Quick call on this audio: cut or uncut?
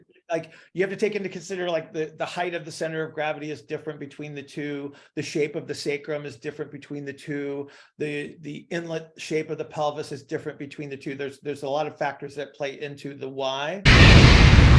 cut